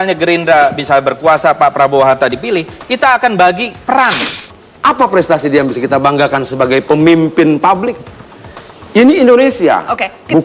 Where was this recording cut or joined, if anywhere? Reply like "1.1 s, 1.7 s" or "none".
4.3 s